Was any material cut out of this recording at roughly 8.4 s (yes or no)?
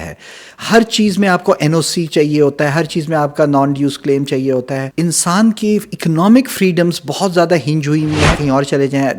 yes